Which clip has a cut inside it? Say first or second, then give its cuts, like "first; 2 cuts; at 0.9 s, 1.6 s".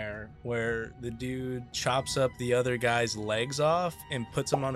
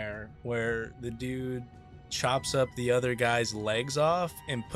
first; 1 cut; at 1.7 s